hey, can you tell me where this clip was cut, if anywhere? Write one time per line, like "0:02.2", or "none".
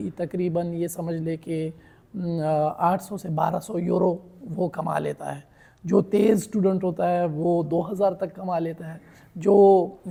none